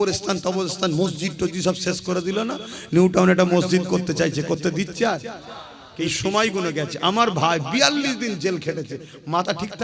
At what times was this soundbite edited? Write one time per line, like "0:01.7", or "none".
0:06.1